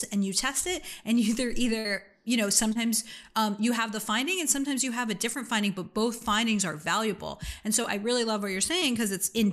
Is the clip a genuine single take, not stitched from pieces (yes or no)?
yes